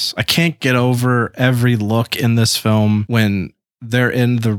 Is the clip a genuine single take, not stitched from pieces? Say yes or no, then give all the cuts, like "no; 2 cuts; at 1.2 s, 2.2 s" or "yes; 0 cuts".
no; 1 cut; at 3.1 s